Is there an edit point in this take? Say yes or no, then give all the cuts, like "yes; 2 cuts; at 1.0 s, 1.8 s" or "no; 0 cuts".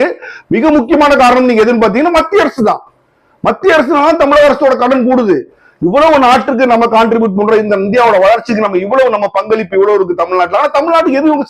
no; 0 cuts